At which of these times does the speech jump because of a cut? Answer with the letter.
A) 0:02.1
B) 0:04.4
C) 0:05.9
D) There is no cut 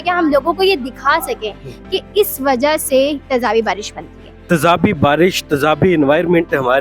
B